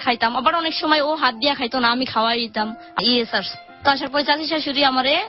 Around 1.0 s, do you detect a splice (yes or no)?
no